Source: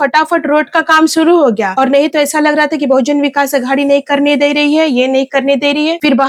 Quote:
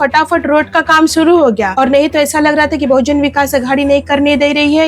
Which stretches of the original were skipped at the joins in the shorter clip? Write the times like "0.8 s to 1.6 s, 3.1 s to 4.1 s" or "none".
none